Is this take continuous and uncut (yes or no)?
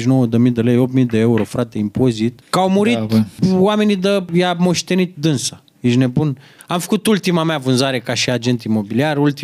no